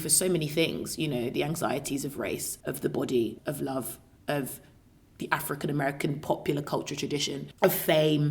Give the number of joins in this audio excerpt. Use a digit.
2